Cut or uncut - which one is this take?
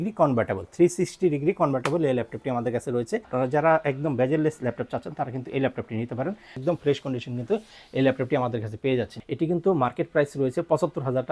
cut